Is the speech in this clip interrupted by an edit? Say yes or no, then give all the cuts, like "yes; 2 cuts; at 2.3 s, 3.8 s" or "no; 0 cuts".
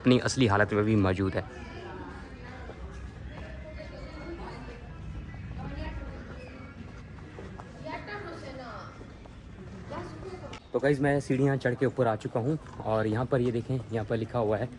no; 0 cuts